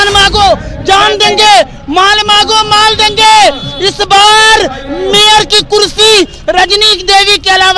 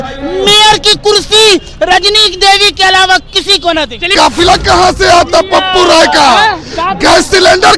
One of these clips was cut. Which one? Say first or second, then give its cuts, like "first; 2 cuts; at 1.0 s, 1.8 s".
second; 1 cut; at 4.1 s